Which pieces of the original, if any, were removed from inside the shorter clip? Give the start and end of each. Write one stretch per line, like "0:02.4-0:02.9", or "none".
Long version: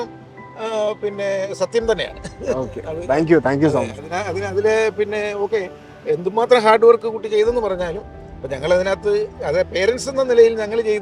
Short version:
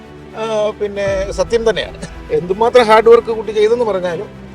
0:02.3-0:05.8